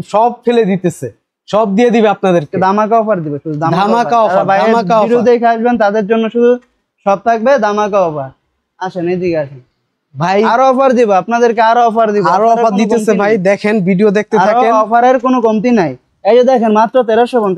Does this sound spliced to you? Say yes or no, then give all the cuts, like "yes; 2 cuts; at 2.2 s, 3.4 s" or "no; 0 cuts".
no; 0 cuts